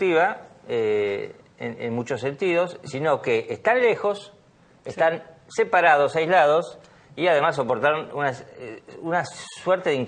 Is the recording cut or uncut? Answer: uncut